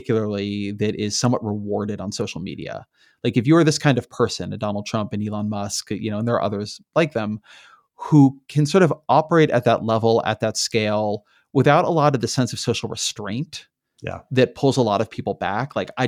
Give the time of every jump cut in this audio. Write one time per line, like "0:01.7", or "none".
none